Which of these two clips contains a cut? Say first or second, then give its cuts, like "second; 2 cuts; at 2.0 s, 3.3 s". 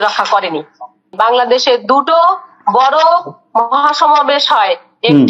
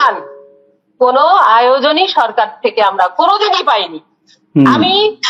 first; 1 cut; at 1.1 s